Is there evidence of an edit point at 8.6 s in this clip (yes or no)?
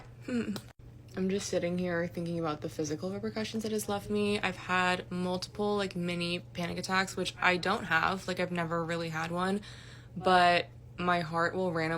yes